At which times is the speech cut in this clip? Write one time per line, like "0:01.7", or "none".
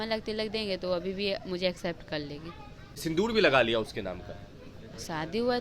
0:03.0